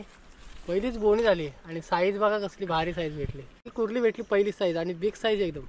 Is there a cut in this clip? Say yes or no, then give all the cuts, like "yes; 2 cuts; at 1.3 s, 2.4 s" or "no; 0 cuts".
yes; 1 cut; at 3.7 s